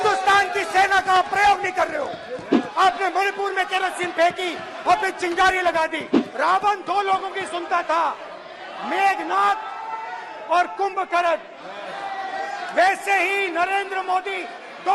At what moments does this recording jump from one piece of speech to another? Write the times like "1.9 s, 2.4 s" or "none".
2.6 s, 6.3 s